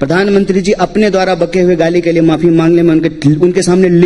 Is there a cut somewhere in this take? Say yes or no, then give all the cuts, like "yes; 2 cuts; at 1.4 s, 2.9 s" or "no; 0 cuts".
no; 0 cuts